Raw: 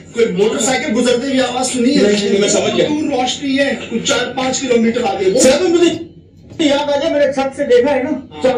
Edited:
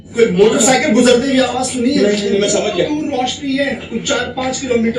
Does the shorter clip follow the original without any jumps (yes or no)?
yes